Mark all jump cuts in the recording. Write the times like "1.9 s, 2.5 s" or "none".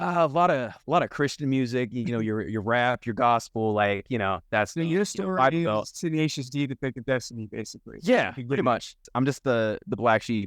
9.0 s